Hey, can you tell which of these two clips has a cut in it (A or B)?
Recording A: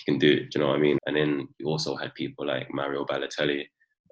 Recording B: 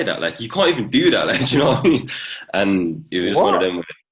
A